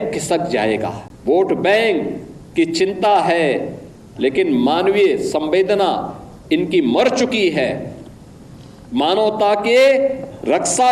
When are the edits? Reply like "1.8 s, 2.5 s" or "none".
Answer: 1.1 s

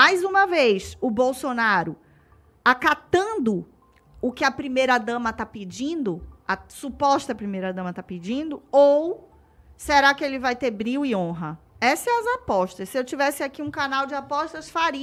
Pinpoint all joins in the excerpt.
none

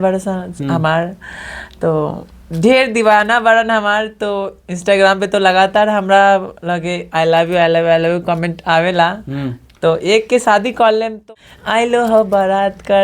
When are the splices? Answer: 11.2 s

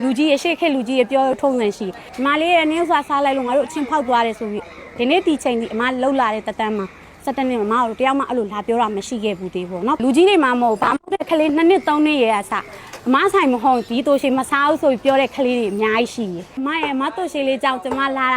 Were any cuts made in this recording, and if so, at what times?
2.0 s, 10.0 s, 16.6 s

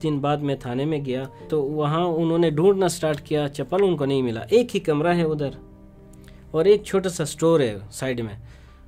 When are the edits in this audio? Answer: 1.5 s

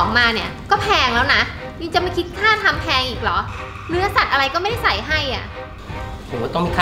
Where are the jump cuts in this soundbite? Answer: none

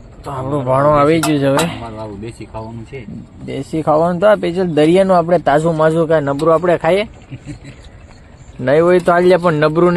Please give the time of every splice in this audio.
none

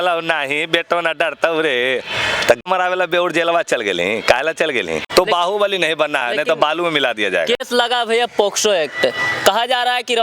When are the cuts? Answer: 2.6 s, 5.0 s

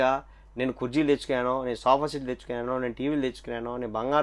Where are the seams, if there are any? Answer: none

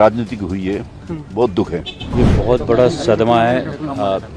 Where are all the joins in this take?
2.0 s

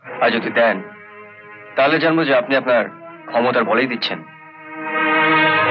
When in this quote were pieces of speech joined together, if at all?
none

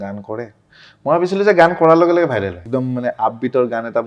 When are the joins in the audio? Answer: 2.7 s

